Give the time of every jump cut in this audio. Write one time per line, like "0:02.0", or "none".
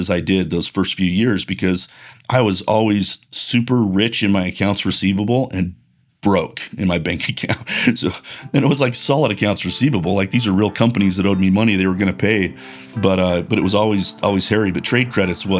none